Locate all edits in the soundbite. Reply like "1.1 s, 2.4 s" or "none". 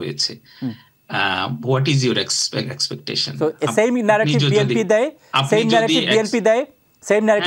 none